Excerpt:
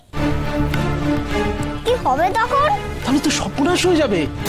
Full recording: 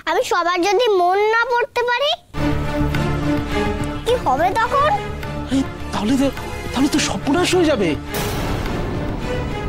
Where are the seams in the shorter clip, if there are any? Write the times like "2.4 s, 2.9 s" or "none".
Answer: 2.9 s